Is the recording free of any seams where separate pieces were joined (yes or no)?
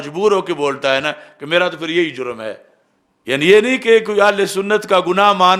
yes